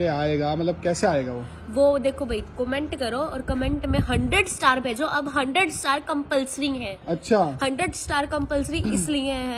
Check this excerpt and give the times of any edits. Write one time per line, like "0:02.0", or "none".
none